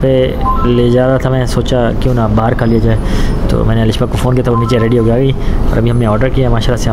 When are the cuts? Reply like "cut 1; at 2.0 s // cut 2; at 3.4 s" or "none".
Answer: none

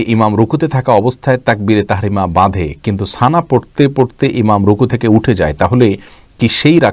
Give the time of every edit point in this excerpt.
none

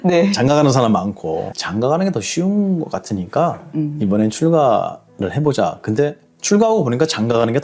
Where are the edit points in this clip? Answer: cut 1; at 1.5 s

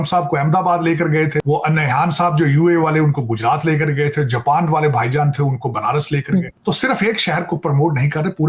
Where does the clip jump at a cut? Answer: cut 1; at 1.4 s // cut 2; at 6.5 s

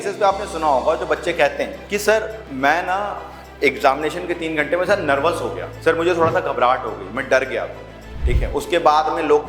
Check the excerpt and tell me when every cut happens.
cut 1; at 1.8 s // cut 2; at 2.4 s // cut 3; at 5.7 s

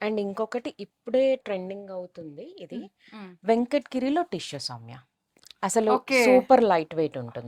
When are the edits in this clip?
none

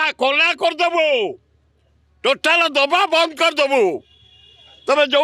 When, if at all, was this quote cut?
none

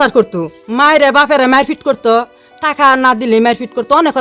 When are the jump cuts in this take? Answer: none

